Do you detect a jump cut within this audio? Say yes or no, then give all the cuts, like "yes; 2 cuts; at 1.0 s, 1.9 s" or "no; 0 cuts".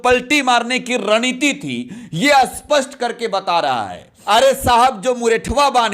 yes; 1 cut; at 4.1 s